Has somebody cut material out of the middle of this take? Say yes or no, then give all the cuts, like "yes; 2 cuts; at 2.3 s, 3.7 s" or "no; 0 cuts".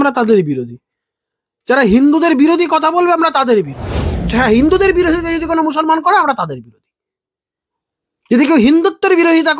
yes; 1 cut; at 4.3 s